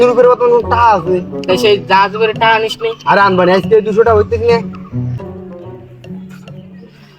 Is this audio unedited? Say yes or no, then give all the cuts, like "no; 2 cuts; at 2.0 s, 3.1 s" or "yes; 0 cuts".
no; 1 cut; at 5.2 s